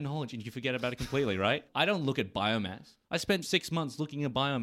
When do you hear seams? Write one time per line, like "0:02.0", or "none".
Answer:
0:01.7
0:03.4